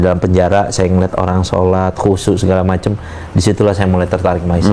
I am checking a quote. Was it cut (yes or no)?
no